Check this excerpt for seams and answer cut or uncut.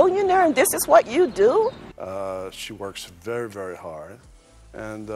cut